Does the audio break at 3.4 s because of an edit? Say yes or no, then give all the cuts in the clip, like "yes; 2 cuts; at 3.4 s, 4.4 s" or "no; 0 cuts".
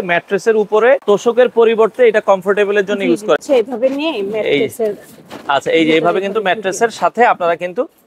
yes; 2 cuts; at 1.0 s, 3.4 s